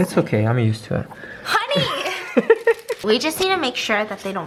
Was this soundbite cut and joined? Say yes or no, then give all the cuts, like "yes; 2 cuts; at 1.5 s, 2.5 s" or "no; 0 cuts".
no; 0 cuts